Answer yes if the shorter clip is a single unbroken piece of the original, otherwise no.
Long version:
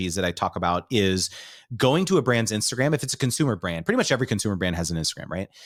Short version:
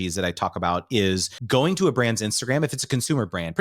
no